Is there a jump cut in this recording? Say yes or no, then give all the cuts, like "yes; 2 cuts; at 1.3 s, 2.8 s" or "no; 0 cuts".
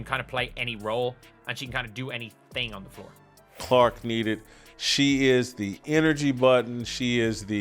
yes; 1 cut; at 3.5 s